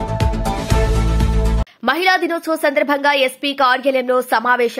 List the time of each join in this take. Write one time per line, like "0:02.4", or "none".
0:01.6